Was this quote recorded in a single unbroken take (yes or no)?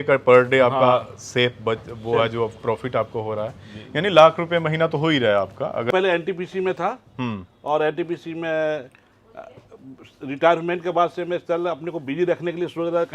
no